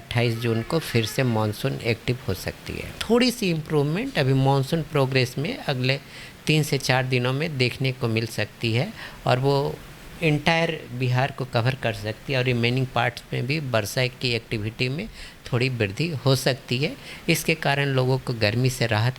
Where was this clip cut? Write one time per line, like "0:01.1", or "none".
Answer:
0:02.9